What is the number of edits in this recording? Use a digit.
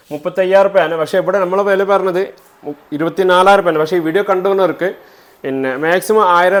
0